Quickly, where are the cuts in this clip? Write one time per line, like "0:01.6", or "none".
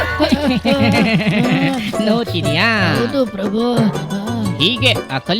none